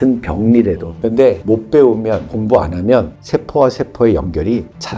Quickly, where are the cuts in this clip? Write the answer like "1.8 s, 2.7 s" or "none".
0.9 s